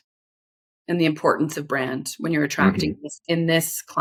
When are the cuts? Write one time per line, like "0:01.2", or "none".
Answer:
none